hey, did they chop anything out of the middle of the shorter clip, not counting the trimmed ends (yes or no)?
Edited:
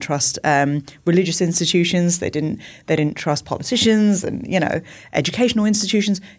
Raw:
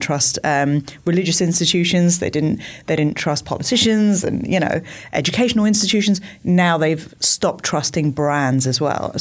no